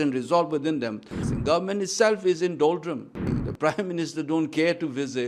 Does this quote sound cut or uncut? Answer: cut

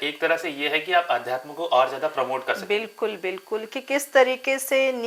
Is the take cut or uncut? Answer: uncut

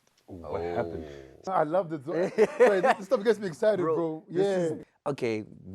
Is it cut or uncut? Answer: cut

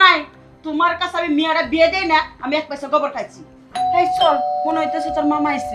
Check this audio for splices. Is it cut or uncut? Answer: cut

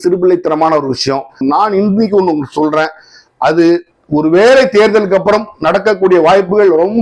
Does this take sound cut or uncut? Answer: cut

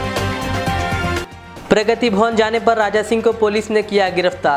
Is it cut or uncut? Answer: uncut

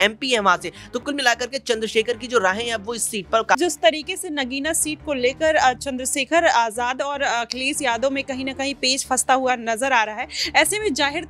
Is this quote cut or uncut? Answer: cut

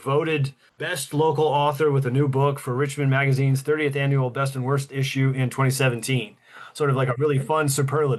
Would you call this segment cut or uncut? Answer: uncut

